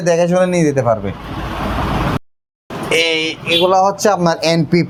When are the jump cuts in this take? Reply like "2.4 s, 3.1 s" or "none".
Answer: none

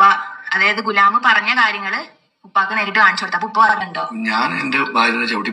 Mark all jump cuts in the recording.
3.8 s

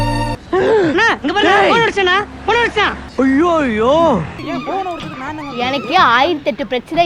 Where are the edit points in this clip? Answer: 4.4 s

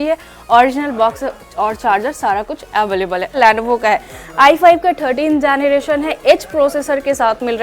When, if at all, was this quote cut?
3.4 s

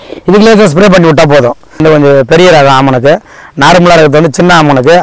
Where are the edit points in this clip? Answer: 1.8 s

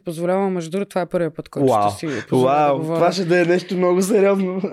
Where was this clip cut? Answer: none

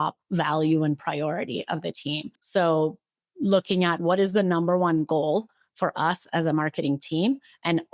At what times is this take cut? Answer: 2.4 s

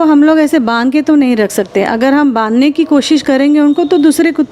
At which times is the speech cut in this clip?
none

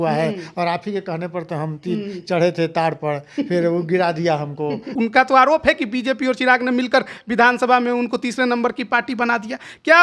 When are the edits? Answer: 4.9 s

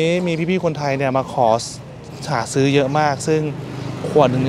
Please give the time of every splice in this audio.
none

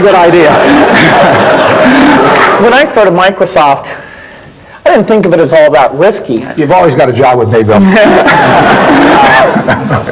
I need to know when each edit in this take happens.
2.6 s, 6.5 s

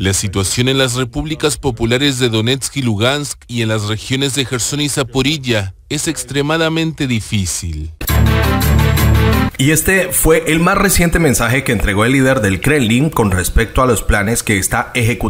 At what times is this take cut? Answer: 8.0 s

